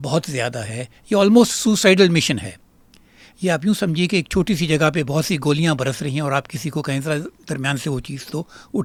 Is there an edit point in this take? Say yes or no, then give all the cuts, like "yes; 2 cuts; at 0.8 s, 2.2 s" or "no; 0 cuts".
no; 0 cuts